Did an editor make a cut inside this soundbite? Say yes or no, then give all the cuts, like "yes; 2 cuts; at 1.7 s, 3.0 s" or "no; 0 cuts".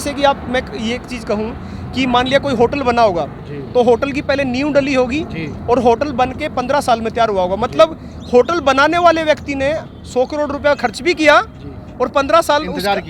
no; 0 cuts